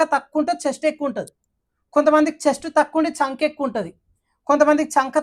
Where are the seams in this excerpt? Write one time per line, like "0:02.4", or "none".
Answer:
none